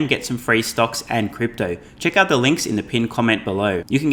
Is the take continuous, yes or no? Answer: yes